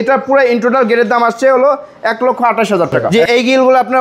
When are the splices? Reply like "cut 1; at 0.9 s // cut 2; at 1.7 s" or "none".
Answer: cut 1; at 3.0 s